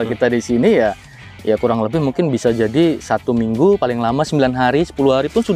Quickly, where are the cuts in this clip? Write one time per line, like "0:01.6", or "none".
none